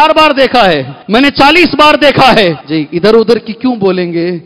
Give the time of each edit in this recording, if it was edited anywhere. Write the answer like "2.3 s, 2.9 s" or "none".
0.9 s, 2.6 s